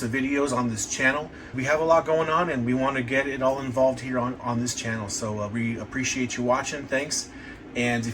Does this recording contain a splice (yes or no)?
yes